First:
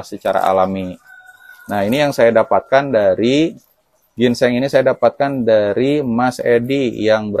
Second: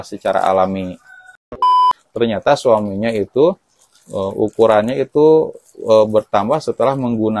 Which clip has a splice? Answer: second; 1 cut; at 1.7 s

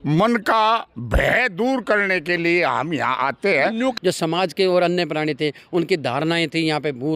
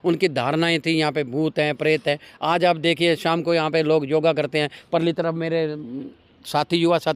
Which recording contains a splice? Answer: first; 1 cut; at 3.9 s

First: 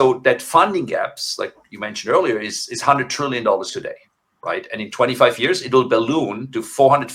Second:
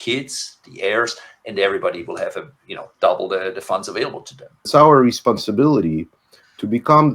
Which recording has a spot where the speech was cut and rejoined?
second; 1 cut; at 4.7 s

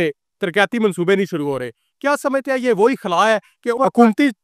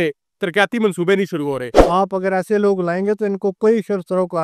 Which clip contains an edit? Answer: second; 1 cut; at 1.7 s

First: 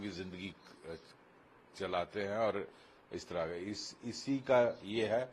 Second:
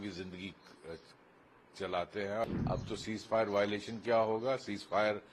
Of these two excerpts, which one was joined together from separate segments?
second; 1 cut; at 2.4 s

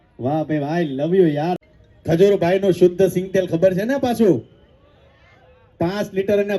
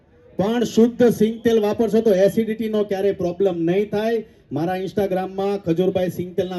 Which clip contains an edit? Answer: first; 1 cut; at 1.6 s

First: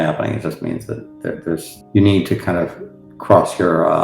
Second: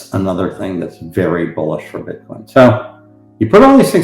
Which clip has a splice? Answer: first; 1 cut; at 1.8 s

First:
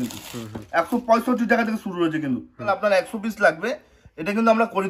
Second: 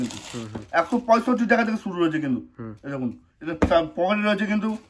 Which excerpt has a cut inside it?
first; 1 cut; at 2.7 s

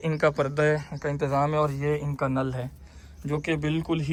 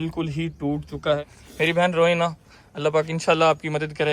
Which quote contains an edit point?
second; 1 cut; at 1.4 s

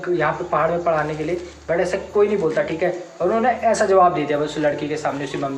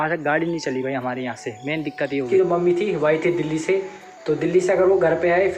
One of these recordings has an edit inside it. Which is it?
second; 1 cut; at 2.3 s

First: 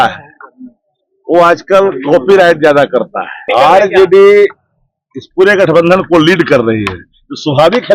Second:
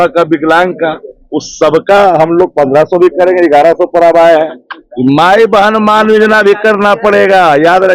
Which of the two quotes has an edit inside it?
first; 1 cut; at 3.5 s

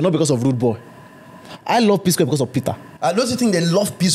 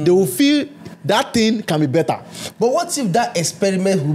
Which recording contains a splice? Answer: first; 1 cut; at 2.8 s

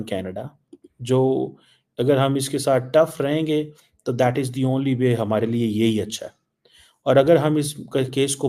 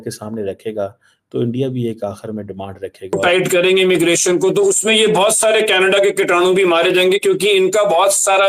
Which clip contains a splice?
second; 1 cut; at 3.2 s

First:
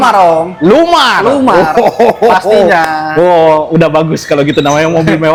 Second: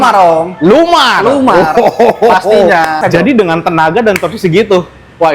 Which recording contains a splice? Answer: second; 1 cut; at 3.0 s

